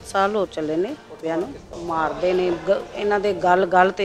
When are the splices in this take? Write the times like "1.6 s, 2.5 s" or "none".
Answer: 1.7 s